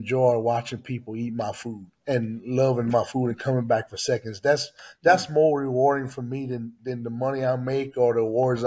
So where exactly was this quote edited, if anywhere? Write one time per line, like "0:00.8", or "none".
none